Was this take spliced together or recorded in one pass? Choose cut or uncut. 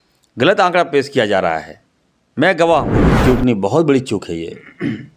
cut